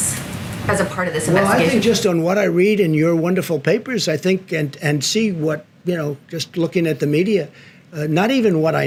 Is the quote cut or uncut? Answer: uncut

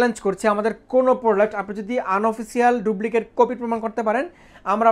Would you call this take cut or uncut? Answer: uncut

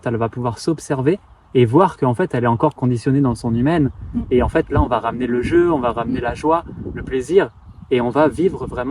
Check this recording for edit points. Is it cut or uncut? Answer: uncut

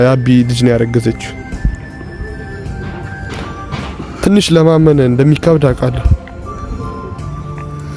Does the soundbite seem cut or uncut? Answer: uncut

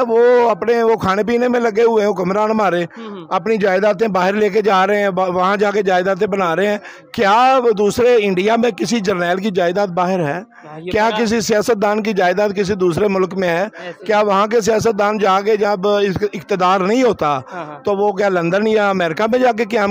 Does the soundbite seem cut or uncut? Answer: uncut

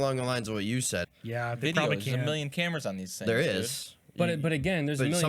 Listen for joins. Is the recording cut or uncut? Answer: cut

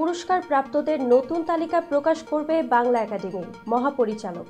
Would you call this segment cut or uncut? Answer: uncut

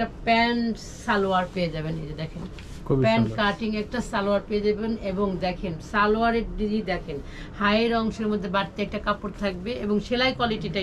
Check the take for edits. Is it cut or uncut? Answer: uncut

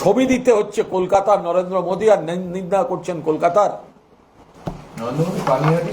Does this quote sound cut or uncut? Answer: uncut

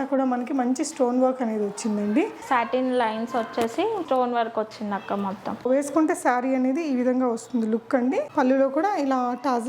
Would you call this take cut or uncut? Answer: cut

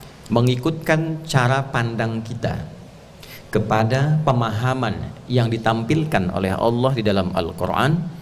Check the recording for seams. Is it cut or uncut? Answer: uncut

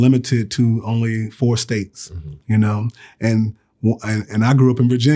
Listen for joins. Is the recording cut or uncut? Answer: uncut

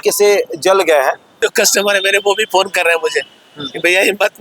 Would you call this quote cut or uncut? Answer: cut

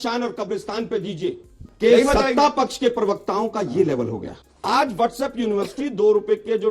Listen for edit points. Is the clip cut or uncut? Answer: cut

